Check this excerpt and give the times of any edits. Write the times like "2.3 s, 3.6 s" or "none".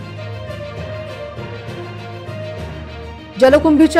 1.4 s, 2.8 s